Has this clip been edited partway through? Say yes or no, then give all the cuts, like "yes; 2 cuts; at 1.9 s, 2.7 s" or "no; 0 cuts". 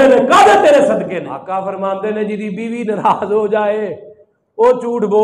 yes; 1 cut; at 1.3 s